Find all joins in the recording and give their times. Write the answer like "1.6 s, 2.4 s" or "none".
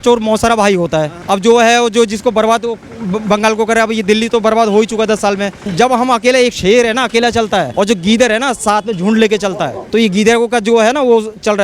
1.2 s, 5.6 s, 7.7 s, 9.8 s